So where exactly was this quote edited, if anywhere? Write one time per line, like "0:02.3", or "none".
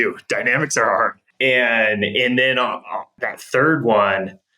0:01.2
0:03.2